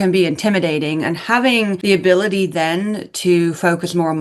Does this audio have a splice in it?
no; 0 cuts

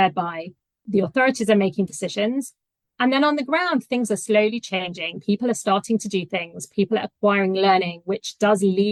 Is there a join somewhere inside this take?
no; 0 cuts

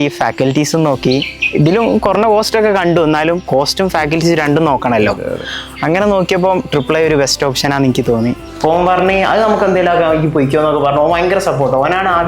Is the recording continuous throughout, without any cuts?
no; 1 cut; at 8.5 s

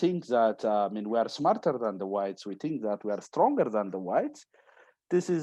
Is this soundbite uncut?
yes; 0 cuts

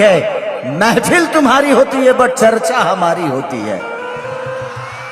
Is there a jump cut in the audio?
no; 0 cuts

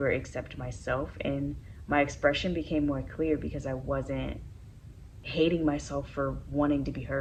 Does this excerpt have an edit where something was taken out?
no; 0 cuts

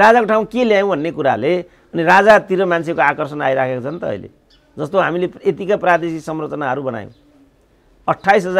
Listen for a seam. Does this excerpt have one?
no; 0 cuts

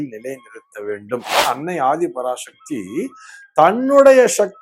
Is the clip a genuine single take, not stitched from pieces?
no; 1 cut; at 1.4 s

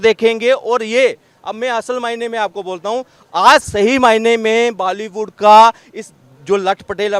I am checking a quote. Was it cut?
no; 0 cuts

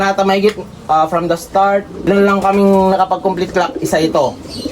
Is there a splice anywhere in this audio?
yes; 1 cut; at 2.1 s

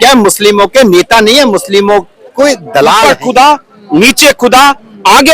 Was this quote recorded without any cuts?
no; 1 cut; at 3.0 s

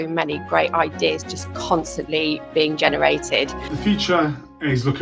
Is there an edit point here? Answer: yes; 1 cut; at 3.7 s

